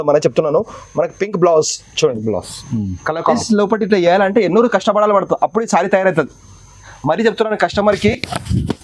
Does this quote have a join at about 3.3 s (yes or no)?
yes